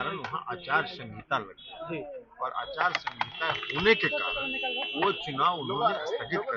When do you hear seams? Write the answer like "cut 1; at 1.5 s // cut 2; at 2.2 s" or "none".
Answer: none